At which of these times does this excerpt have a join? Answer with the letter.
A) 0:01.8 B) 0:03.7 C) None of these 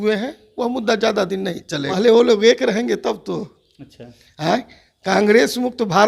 A